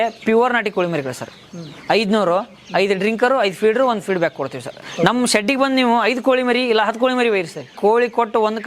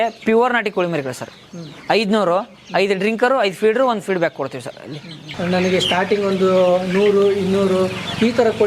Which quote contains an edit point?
first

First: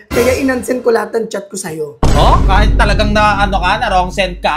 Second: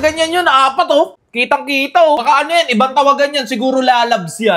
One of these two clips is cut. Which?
second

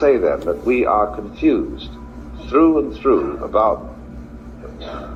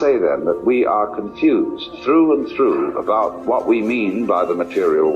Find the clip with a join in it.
second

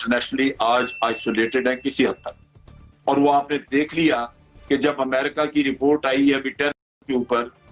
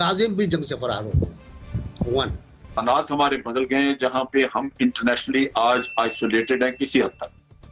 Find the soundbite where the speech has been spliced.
second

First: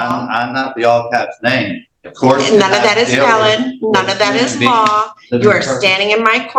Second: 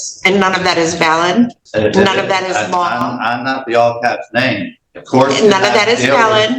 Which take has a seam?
second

